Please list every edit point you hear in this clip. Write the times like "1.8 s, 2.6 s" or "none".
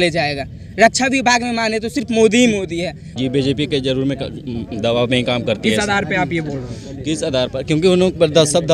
none